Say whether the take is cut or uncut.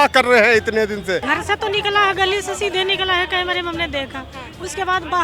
cut